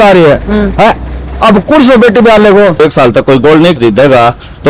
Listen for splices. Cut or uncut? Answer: cut